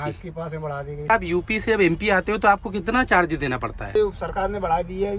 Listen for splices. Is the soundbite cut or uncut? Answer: cut